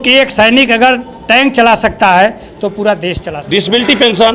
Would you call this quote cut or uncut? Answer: cut